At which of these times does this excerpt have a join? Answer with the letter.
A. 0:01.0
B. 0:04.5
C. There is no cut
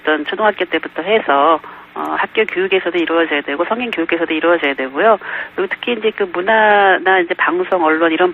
A